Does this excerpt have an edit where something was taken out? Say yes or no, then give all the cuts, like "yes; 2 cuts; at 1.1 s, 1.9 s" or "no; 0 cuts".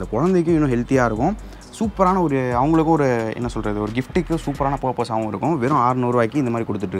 no; 0 cuts